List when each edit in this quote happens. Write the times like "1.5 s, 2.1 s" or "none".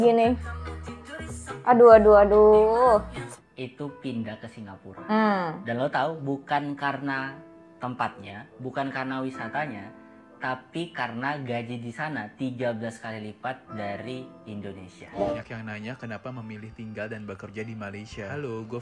3.4 s, 15.2 s